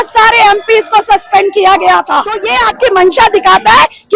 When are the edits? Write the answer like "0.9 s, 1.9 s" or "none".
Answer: 2.5 s

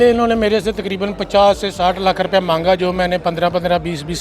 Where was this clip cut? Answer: none

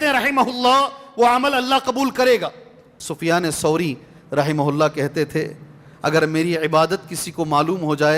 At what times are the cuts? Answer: 3.1 s

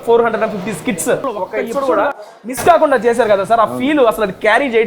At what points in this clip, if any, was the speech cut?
1.3 s

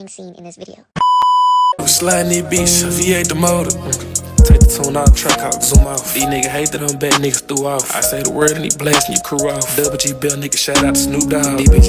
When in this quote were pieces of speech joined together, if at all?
1.8 s

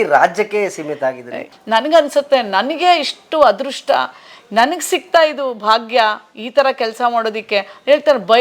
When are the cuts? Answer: 1.5 s

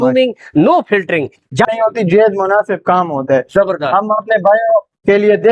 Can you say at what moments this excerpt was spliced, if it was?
1.7 s

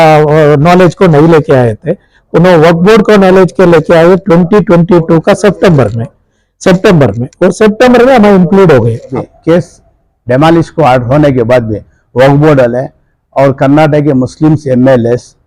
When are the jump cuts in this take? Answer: 9.1 s

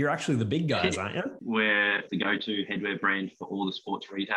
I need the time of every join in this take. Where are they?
1.4 s, 2.0 s

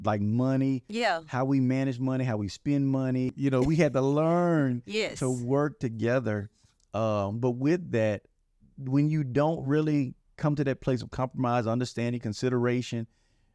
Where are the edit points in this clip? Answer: 3.3 s

